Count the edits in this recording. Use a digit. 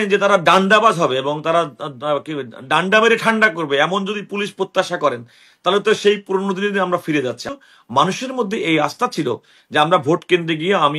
1